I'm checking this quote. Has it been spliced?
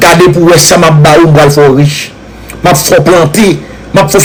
no; 0 cuts

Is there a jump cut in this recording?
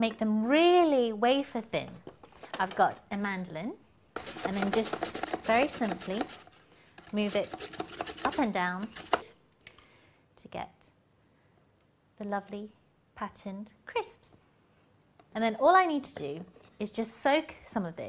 yes; 1 cut; at 10.5 s

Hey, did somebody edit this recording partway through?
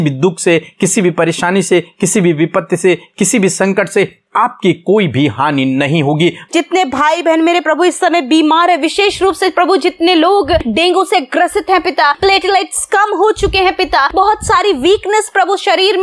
yes; 4 cuts; at 6.5 s, 10.7 s, 12.2 s, 14.1 s

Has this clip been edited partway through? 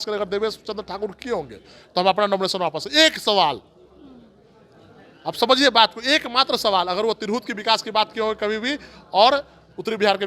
no; 0 cuts

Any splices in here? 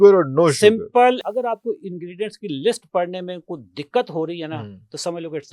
yes; 1 cut; at 1.2 s

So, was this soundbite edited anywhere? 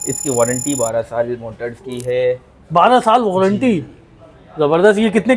no; 0 cuts

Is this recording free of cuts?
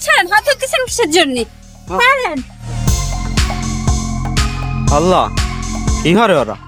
yes; 0 cuts

